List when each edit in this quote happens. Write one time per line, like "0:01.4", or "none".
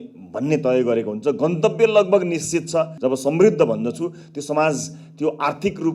0:02.9